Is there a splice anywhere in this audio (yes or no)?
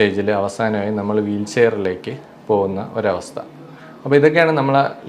no